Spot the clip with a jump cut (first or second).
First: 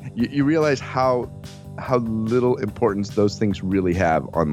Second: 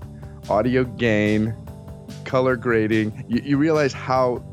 second